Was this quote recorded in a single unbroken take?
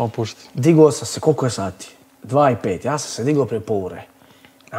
yes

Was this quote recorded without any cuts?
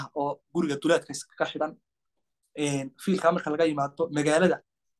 yes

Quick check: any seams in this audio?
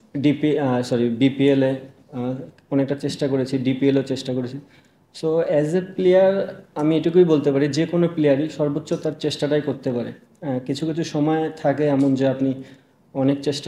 no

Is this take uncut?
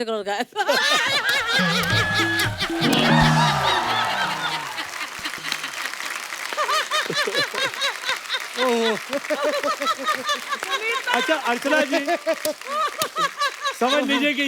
yes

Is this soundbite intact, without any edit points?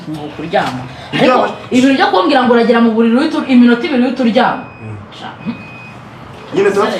yes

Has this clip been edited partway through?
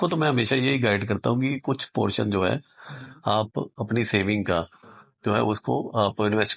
no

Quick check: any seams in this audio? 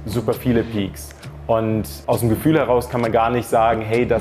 no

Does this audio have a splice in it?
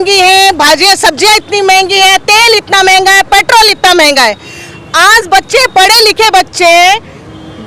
no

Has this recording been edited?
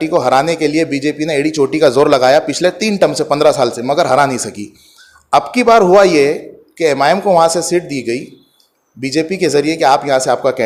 no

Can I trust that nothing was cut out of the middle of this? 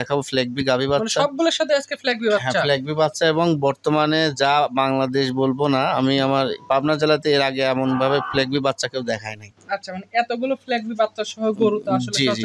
yes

